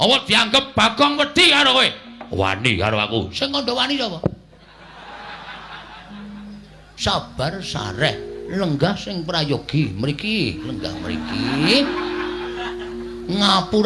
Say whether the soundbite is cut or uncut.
uncut